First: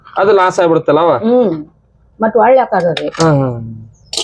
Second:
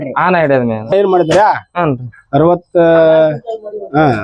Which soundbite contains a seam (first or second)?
second